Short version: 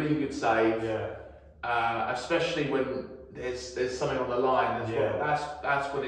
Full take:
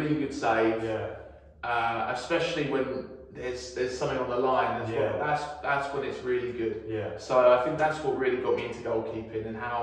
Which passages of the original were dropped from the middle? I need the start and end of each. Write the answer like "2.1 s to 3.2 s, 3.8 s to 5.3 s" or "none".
none

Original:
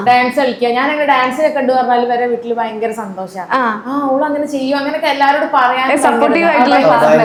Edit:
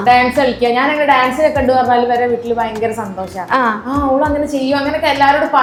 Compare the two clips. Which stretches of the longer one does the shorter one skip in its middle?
none

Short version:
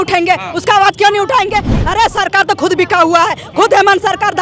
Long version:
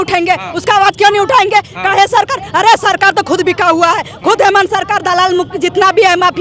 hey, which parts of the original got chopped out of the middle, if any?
1.7 s to 2.4 s

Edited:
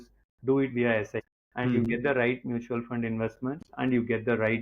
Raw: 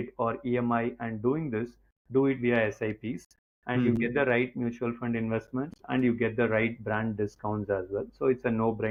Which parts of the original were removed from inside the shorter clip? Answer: 2.9 s to 3.4 s

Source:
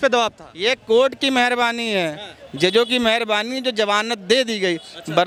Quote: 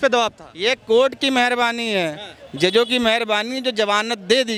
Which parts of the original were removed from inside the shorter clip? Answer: none

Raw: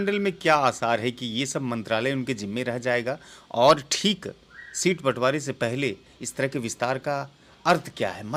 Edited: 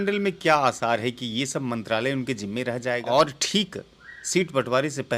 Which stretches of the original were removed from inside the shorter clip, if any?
3.0 s to 3.5 s

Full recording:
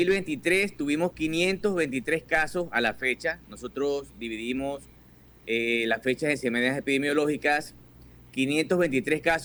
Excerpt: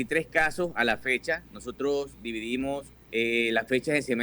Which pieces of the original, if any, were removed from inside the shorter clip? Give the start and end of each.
4.9 s to 5.3 s

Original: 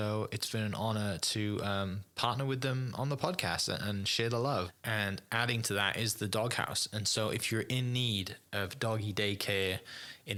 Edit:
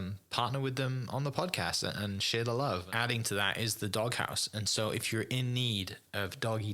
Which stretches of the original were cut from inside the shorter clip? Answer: 4.7 s to 5.3 s

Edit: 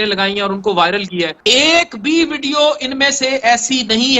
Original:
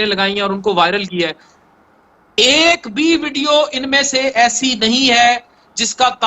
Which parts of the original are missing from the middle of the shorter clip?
1.4 s to 2.3 s

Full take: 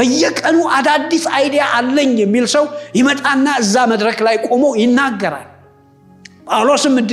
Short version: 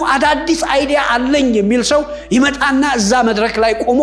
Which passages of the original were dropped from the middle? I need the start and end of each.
none

